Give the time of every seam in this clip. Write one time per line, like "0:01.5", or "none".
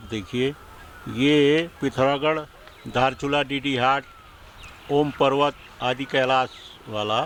none